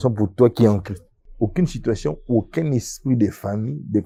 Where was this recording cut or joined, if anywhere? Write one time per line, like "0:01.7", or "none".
none